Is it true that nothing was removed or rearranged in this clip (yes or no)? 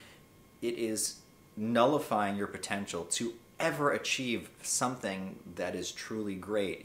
yes